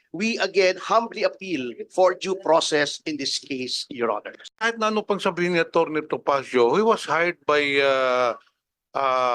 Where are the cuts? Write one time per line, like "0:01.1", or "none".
0:04.4